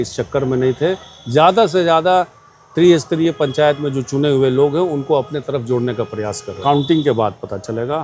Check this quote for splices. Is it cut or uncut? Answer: cut